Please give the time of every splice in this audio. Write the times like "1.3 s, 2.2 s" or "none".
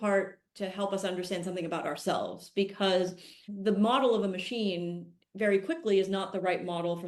3.4 s

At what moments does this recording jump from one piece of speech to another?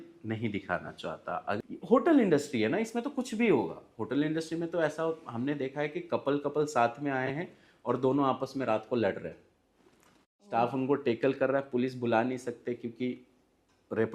1.6 s

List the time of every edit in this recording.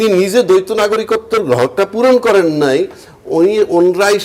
none

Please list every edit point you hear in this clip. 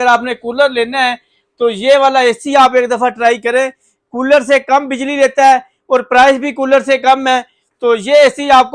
none

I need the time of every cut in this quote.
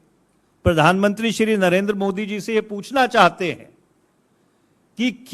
none

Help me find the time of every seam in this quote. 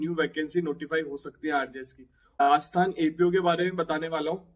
2.3 s

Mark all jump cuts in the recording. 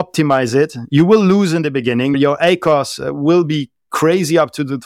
none

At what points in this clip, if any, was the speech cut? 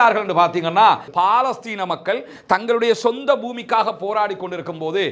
1.1 s

